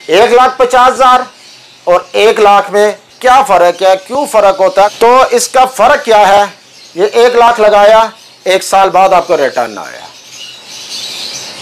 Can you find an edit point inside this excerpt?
yes; 1 cut; at 4.9 s

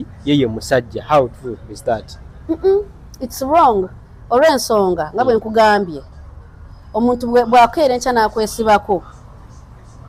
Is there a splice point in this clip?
no; 0 cuts

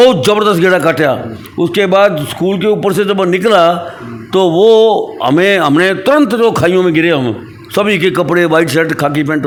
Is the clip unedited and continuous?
yes; 0 cuts

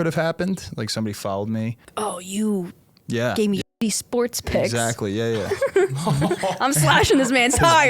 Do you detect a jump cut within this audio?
yes; 1 cut; at 1.8 s

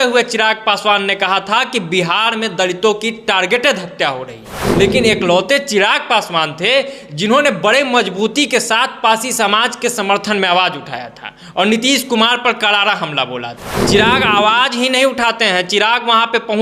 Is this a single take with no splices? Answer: no; 2 cuts; at 4.6 s, 13.7 s

